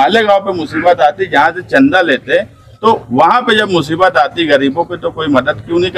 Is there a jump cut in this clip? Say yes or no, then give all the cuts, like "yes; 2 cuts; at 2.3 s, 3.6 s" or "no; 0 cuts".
no; 0 cuts